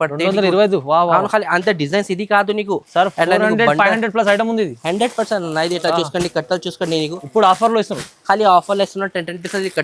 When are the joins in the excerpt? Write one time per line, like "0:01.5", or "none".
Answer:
none